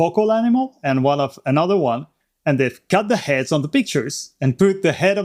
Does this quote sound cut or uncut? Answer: uncut